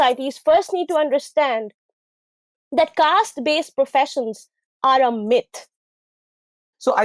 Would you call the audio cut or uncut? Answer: cut